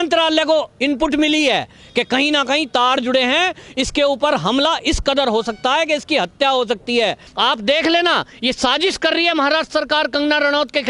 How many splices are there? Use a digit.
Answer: 1